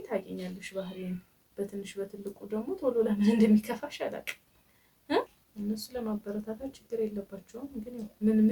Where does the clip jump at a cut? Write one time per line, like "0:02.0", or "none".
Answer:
0:05.4